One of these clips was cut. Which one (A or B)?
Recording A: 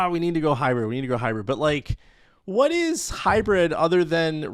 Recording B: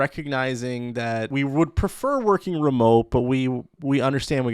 B